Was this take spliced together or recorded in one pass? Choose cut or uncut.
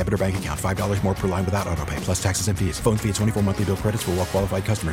uncut